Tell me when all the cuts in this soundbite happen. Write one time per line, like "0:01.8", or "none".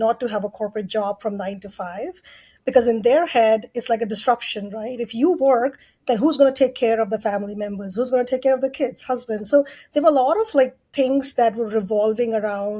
none